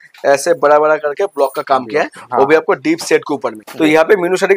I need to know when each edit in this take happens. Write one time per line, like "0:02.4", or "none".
0:03.6